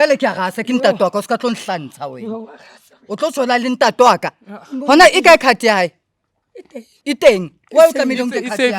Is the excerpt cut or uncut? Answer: cut